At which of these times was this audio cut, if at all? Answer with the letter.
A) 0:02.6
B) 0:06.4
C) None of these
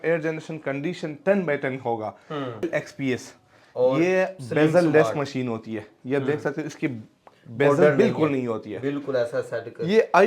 A